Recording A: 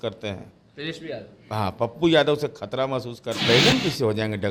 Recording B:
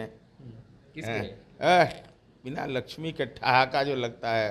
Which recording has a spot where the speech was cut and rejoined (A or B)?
A